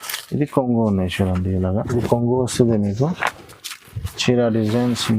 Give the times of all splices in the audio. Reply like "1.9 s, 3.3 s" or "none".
1.9 s